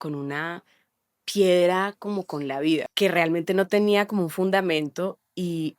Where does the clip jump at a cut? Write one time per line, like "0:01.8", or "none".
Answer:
0:02.9